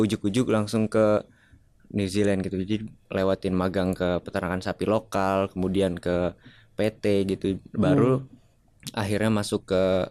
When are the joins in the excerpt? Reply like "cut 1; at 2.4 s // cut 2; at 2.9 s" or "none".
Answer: none